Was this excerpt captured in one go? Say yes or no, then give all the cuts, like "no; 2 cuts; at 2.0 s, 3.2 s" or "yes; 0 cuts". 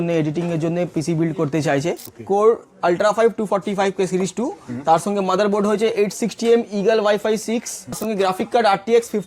no; 2 cuts; at 2.1 s, 8.0 s